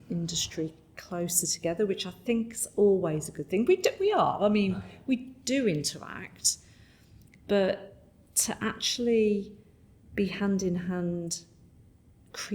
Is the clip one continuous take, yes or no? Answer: yes